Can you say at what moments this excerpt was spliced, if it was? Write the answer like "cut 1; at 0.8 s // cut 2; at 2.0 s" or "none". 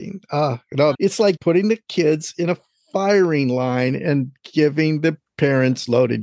cut 1; at 0.9 s